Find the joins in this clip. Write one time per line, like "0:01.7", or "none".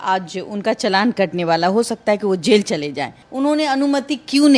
0:03.2

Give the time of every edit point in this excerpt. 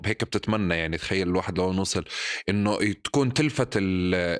none

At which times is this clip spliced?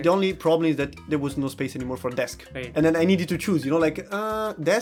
none

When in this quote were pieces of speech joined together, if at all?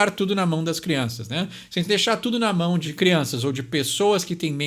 0:02.9

